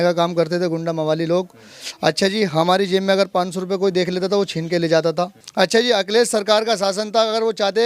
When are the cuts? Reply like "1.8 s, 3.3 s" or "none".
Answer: 5.4 s